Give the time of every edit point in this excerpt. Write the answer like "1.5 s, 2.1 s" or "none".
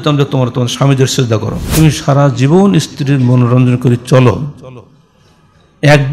1.6 s